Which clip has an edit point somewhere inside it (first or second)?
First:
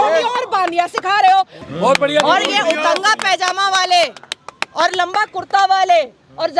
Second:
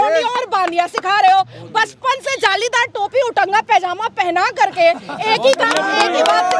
first